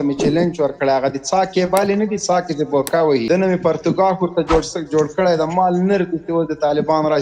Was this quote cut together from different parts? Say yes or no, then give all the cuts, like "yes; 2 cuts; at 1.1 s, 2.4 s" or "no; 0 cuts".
yes; 1 cut; at 3.2 s